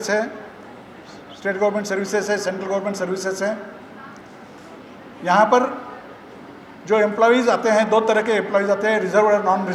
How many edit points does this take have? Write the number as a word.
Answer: zero